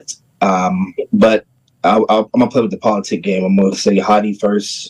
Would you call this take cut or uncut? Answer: cut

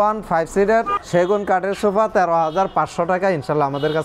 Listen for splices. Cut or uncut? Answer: cut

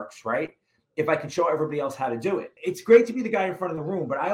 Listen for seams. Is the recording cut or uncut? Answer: cut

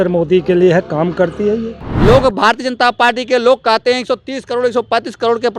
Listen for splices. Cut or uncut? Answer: cut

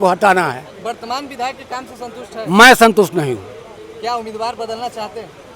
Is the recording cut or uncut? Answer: uncut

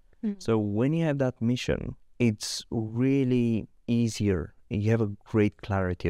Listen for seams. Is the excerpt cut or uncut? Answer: cut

